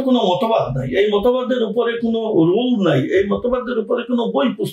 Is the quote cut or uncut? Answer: uncut